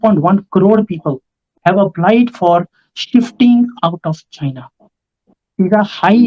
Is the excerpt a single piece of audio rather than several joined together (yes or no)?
no